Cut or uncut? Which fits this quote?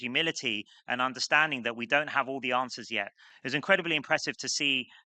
cut